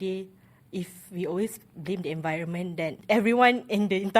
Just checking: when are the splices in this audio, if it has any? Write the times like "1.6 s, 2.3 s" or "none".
3.0 s